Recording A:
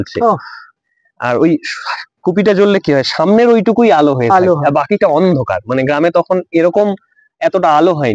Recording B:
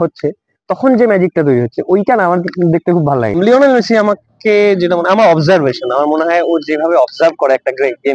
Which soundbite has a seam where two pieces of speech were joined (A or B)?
B